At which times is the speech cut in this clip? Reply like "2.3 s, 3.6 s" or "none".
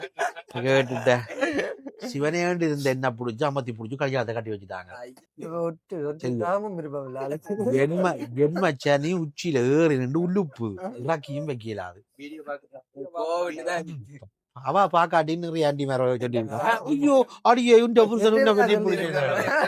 none

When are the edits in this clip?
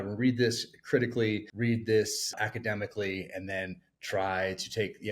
1.5 s, 2.3 s

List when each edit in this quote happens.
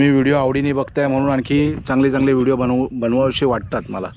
none

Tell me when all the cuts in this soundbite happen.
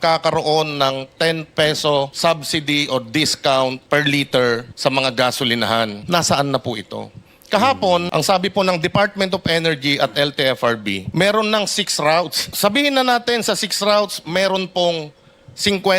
2.1 s, 3.8 s, 4.7 s, 6.0 s, 8.1 s, 11.0 s, 12.4 s

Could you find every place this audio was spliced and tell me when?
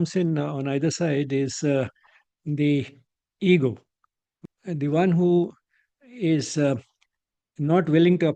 4.3 s

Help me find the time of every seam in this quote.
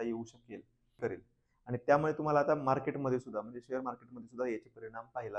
1.0 s

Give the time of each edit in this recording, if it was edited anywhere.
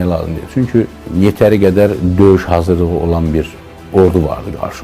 1.0 s

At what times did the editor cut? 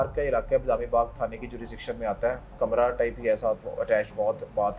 2.5 s

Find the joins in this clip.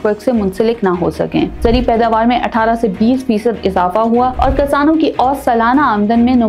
1.6 s

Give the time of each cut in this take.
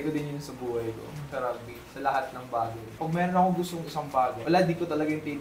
1.3 s, 3.0 s, 4.4 s

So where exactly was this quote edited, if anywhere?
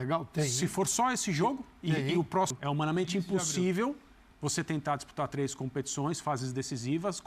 2.6 s

